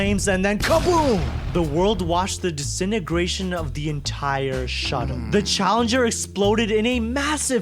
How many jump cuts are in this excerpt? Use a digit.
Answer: 0